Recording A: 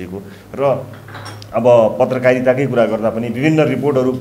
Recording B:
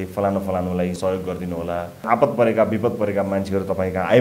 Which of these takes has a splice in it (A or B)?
B